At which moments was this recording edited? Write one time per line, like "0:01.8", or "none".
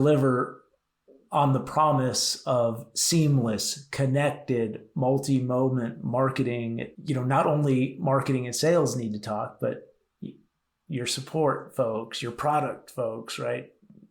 0:06.9